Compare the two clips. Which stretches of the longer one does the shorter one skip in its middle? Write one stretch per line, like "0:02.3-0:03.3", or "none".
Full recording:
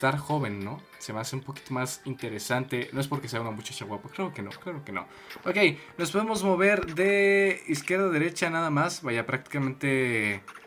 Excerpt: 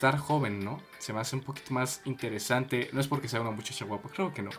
none